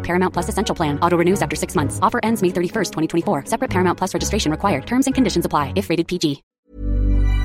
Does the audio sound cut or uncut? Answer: cut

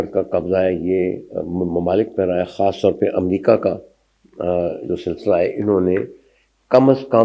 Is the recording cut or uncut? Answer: uncut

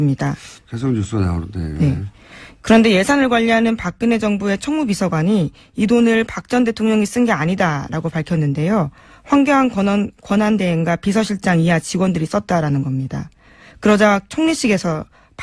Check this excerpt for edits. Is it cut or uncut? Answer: uncut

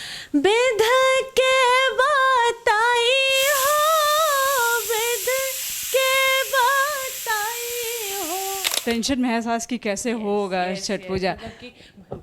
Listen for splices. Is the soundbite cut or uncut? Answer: cut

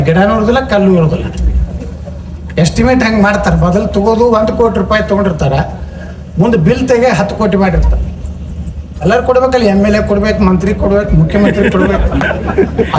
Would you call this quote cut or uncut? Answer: uncut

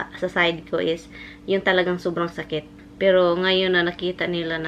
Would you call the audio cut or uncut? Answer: cut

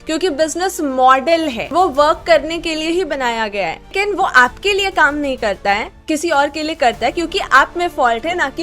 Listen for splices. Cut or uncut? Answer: cut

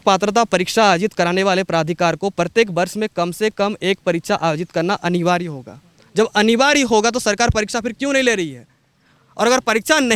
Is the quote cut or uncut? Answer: uncut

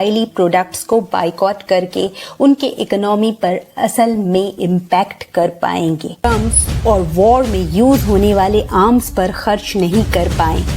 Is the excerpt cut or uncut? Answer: cut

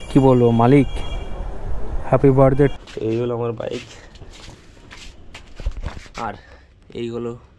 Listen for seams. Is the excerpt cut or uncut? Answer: cut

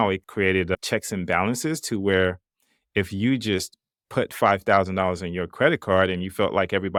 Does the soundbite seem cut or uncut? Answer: uncut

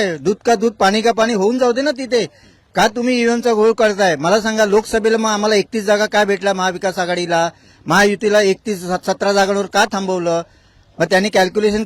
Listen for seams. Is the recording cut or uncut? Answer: uncut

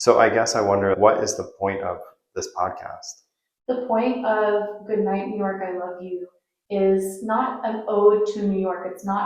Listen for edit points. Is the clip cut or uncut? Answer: cut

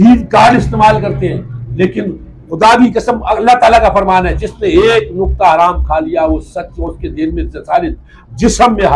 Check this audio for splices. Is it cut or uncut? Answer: uncut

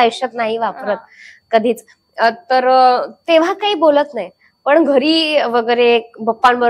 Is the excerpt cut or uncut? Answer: uncut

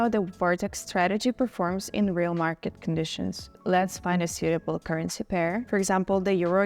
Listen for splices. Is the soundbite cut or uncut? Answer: cut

